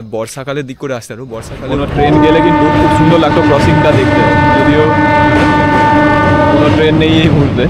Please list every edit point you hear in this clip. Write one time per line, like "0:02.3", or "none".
0:01.6